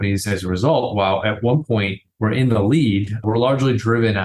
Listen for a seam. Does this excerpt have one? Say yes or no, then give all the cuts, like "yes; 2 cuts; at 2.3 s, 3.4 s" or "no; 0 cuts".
yes; 1 cut; at 2.0 s